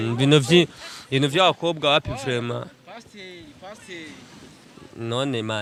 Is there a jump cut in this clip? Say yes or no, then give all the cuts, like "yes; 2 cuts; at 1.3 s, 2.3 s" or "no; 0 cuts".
no; 0 cuts